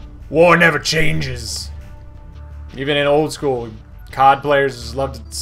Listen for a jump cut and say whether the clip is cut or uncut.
uncut